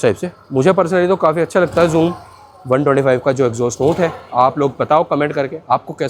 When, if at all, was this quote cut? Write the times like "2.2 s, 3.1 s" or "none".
none